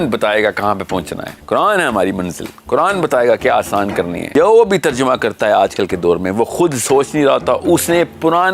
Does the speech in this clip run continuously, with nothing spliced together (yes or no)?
no